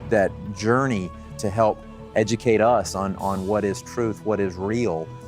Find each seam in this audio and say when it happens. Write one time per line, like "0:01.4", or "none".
0:01.3